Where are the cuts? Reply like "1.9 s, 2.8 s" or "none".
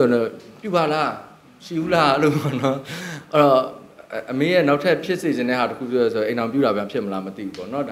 none